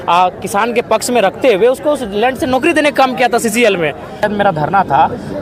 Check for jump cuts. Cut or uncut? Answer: cut